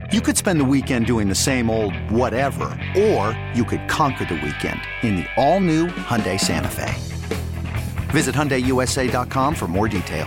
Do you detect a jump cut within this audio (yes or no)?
no